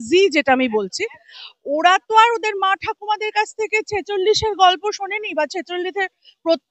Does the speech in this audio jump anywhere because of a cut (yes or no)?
no